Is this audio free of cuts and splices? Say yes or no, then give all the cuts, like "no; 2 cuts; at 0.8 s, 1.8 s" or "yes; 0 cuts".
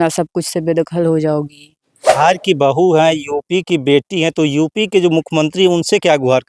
no; 1 cut; at 2.2 s